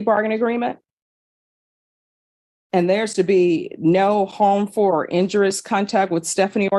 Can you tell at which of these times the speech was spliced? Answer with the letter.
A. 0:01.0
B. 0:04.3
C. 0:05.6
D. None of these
D